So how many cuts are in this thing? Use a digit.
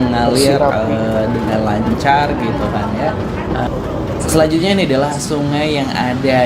1